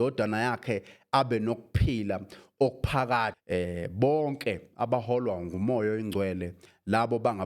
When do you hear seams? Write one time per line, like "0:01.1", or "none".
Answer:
0:03.4